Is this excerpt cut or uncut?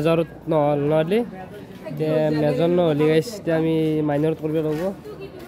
uncut